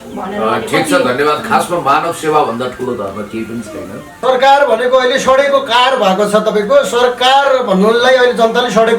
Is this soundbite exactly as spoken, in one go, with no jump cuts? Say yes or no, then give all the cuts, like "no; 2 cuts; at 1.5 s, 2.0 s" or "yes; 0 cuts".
no; 1 cut; at 4.2 s